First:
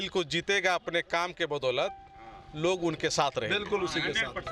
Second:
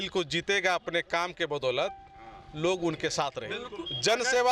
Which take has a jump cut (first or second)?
second